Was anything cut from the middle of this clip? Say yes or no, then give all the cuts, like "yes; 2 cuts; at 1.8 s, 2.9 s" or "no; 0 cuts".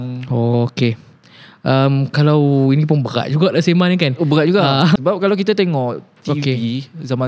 yes; 1 cut; at 5.0 s